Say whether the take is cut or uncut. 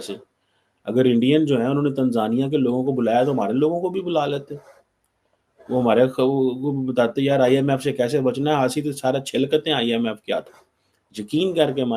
uncut